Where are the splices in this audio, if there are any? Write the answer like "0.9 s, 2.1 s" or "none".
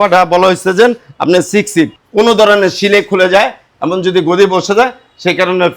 2.0 s